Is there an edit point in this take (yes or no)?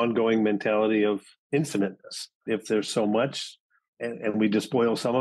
yes